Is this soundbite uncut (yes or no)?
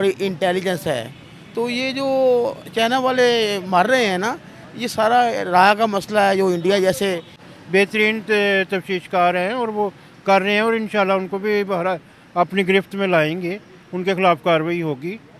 no